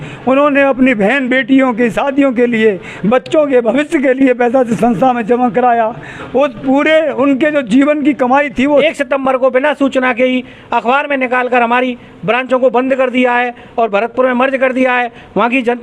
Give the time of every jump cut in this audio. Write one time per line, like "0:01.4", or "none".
0:08.8